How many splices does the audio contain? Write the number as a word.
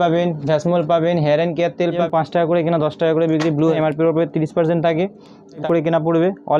three